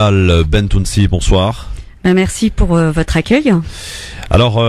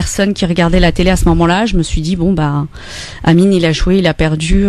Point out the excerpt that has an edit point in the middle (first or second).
second